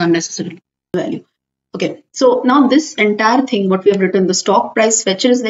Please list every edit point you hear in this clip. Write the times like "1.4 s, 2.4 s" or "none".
0.9 s